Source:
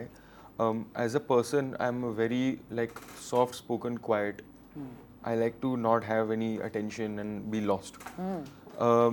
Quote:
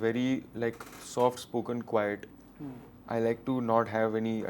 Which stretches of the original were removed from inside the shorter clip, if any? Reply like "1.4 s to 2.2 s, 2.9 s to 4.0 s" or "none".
none